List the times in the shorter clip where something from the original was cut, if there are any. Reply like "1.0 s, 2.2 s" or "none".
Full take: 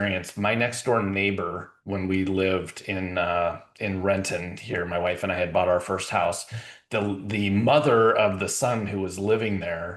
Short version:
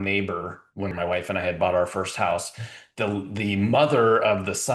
0.9 s